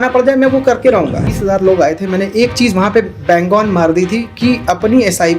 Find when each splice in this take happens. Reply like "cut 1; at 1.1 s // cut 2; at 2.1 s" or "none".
cut 1; at 1.4 s